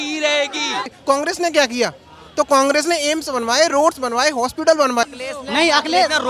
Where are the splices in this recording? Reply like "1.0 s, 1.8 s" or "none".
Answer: 0.9 s, 5.2 s